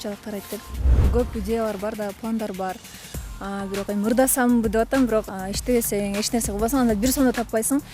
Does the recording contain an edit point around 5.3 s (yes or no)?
yes